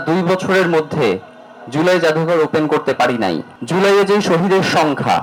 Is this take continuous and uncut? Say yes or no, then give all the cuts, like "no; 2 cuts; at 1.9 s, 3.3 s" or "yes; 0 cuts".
yes; 0 cuts